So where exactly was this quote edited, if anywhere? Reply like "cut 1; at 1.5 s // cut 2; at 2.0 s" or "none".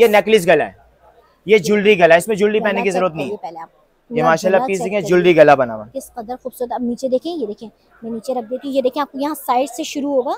none